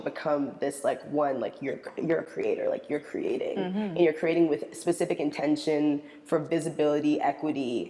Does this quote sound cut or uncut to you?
uncut